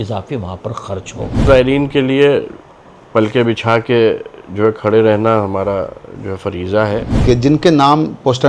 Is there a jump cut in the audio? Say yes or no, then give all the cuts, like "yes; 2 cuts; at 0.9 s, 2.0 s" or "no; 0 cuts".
yes; 2 cuts; at 1.5 s, 7.1 s